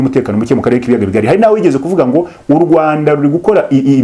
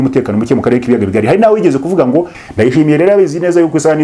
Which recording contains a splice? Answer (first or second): second